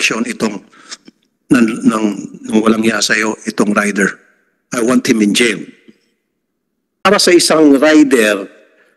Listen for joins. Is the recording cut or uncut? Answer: cut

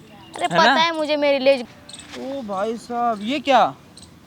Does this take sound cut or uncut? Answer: cut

